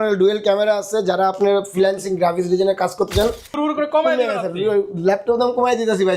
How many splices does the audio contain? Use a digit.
1